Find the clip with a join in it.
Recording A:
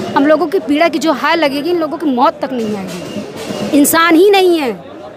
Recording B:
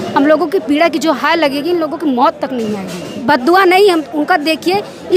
B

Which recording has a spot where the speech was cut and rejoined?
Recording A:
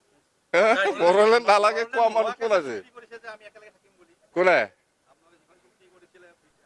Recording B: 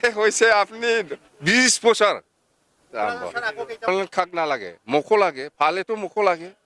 B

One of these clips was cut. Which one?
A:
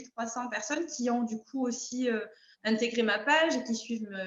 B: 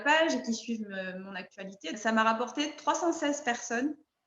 B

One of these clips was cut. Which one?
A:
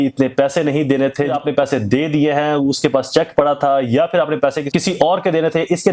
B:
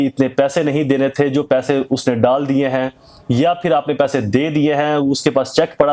A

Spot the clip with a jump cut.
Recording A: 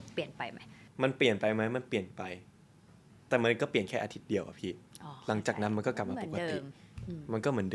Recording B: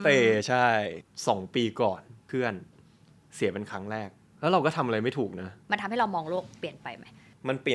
B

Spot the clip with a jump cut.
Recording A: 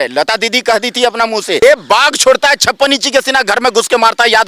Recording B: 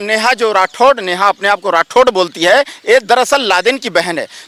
A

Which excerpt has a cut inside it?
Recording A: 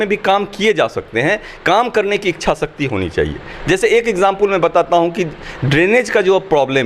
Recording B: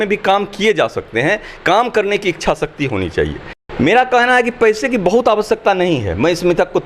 B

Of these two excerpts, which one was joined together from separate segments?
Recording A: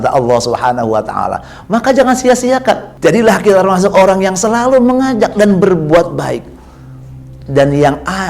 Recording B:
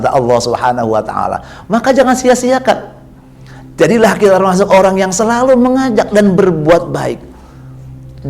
A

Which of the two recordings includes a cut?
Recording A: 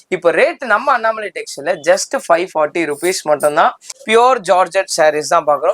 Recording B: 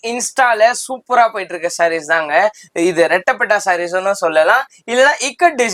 A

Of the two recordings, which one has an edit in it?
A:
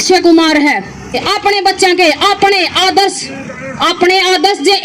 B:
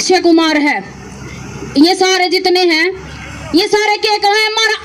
A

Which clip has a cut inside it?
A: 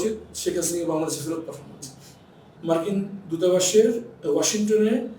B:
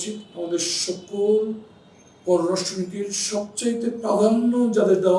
A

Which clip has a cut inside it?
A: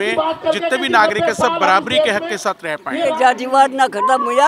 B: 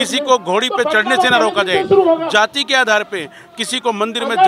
A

